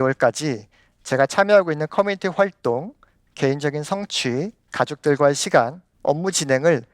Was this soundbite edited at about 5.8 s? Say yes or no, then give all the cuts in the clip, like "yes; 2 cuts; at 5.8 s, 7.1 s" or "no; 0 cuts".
yes; 2 cuts; at 4.6 s, 5.8 s